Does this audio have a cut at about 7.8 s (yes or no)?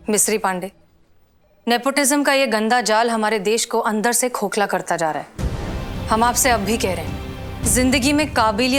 no